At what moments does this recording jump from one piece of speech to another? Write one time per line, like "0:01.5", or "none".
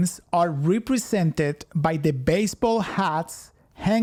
none